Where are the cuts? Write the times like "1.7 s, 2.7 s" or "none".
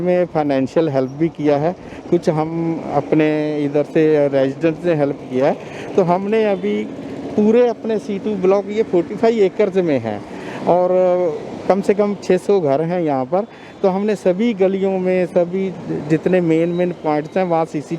none